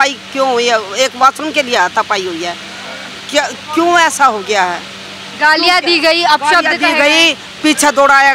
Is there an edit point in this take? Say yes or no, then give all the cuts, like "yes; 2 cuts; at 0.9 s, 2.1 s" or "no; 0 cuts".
no; 0 cuts